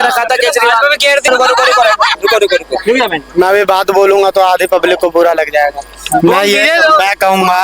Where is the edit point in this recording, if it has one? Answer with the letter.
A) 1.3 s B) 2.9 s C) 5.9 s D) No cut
A